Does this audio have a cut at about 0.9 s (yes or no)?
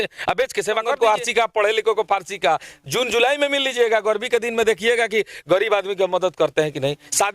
yes